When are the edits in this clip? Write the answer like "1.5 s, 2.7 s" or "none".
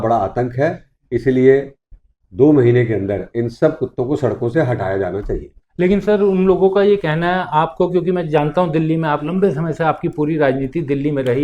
none

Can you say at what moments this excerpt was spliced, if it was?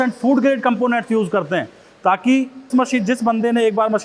2.7 s

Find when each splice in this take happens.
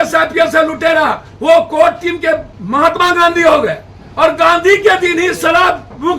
2.6 s

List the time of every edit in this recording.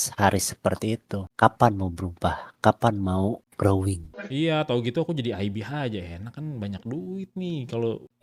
4.2 s

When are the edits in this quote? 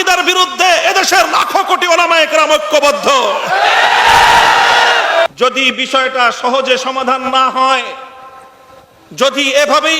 5.3 s

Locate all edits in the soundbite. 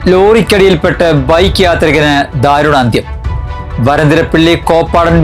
none

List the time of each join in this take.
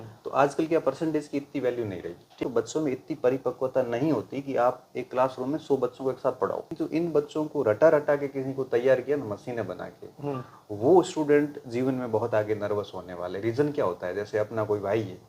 2.4 s, 6.7 s

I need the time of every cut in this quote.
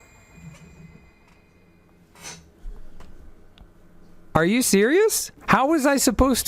5.3 s

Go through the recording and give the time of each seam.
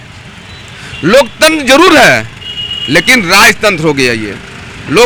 none

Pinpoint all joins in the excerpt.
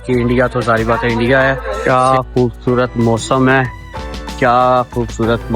1.7 s, 4.3 s

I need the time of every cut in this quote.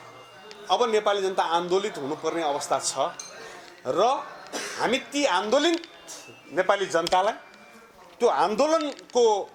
none

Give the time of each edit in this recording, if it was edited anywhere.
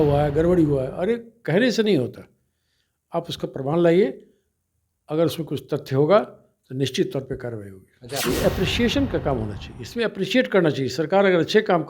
8.2 s

